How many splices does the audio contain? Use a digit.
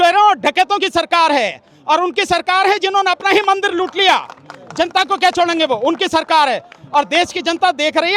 0